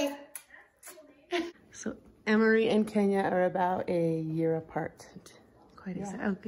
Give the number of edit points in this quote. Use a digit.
1